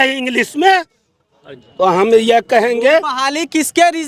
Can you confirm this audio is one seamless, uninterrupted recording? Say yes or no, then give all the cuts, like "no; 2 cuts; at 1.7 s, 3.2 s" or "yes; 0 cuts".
yes; 0 cuts